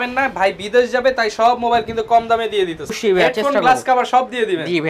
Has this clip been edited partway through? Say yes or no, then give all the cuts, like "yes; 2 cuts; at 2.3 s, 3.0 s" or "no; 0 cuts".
yes; 1 cut; at 3.0 s